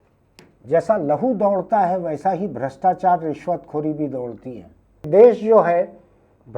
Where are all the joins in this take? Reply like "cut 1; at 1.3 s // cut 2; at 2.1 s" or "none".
cut 1; at 5.1 s